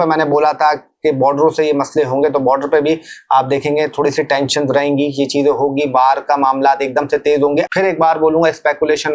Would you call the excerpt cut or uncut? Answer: cut